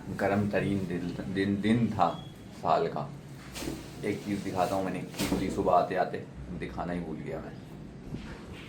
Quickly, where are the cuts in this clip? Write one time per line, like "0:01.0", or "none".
none

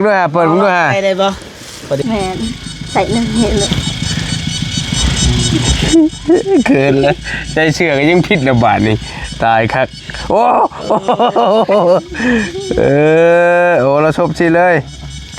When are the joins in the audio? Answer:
0:02.0

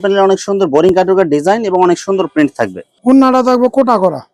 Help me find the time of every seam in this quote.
none

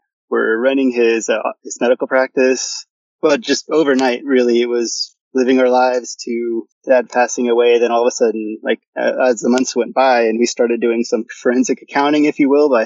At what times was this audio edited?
0:03.0

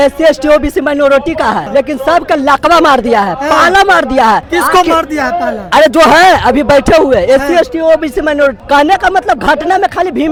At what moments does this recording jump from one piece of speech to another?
none

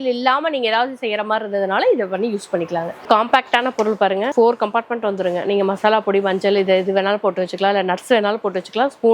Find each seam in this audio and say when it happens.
0:03.0
0:04.3

